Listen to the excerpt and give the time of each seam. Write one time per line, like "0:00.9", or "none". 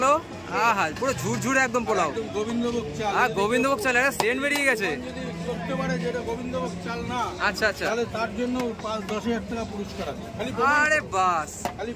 none